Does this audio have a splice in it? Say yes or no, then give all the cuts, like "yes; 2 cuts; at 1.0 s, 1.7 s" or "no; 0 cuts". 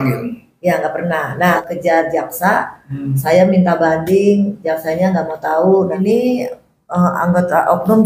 yes; 2 cuts; at 1.6 s, 5.9 s